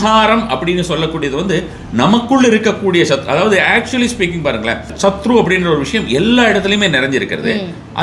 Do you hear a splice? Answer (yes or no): yes